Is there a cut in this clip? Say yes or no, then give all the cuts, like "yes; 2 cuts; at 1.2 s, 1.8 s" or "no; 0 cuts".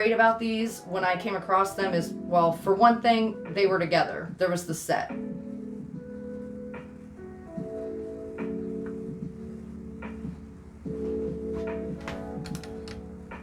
no; 0 cuts